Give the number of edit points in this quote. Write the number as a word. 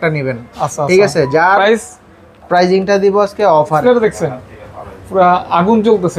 one